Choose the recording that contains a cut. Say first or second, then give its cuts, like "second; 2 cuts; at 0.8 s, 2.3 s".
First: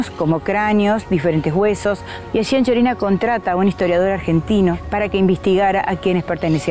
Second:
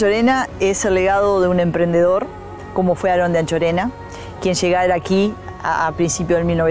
first; 2 cuts; at 2.1 s, 4.8 s